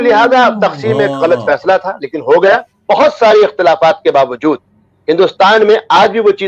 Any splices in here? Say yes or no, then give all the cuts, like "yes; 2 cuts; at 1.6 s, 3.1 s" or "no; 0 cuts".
yes; 1 cut; at 2.7 s